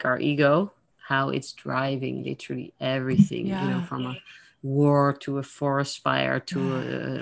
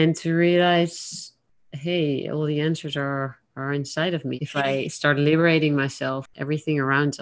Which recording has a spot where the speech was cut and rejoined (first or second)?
second